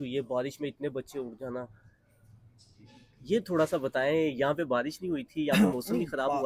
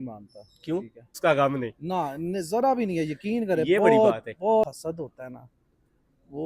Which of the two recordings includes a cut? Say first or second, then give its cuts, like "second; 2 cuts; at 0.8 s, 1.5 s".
second; 2 cuts; at 1.2 s, 4.6 s